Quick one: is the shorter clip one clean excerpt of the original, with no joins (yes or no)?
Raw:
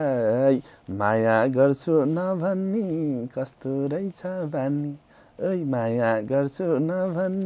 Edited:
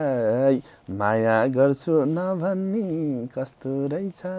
yes